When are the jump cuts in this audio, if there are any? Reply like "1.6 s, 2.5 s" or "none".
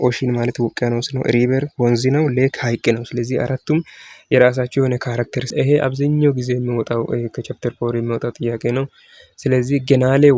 5.5 s